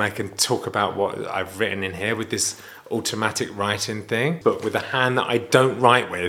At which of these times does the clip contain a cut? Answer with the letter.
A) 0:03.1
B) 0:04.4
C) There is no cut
B